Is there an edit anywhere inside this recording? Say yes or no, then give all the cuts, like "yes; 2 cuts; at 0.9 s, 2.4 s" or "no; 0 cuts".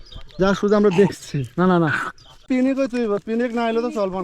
yes; 1 cut; at 2.4 s